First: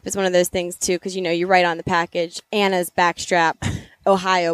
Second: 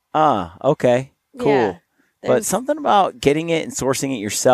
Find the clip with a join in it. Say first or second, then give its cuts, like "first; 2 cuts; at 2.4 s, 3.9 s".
first; 1 cut; at 2.4 s